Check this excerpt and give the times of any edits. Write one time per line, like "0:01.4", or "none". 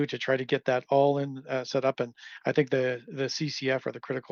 none